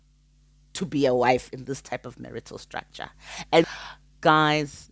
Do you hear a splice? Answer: yes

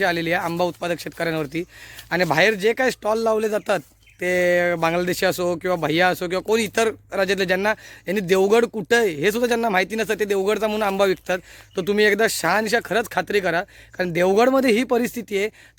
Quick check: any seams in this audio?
no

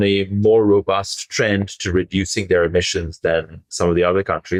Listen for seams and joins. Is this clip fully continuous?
yes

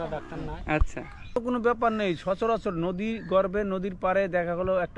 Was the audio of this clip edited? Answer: yes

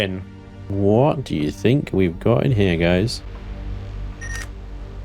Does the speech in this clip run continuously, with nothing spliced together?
yes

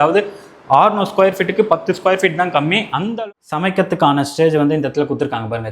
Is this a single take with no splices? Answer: no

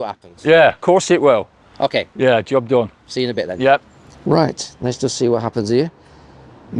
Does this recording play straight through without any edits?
yes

